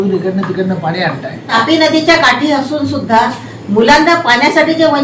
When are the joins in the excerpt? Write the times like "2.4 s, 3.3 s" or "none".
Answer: 1.4 s

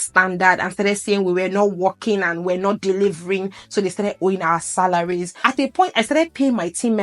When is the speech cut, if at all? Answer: 5.3 s

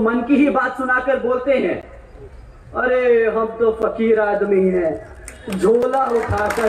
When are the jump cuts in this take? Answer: none

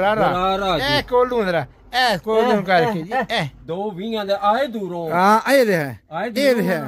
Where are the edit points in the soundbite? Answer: 3.6 s

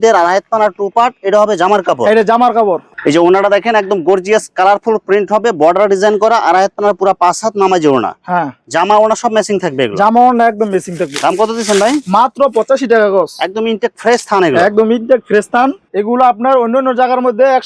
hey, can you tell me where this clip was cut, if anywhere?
none

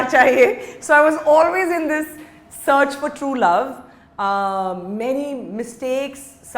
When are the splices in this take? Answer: none

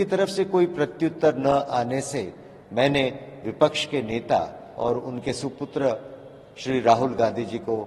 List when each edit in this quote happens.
none

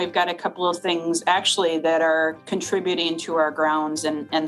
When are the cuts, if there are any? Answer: 2.4 s

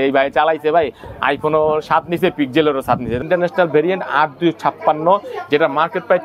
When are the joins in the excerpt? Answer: 3.2 s

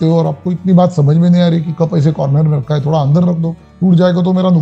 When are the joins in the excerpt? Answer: 3.6 s

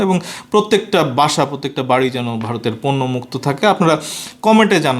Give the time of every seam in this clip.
none

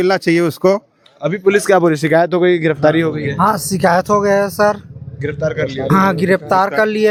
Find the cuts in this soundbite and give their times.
none

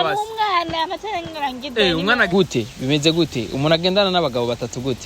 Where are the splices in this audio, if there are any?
2.3 s

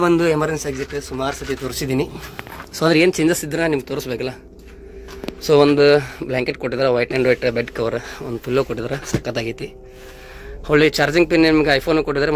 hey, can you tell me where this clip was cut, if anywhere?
none

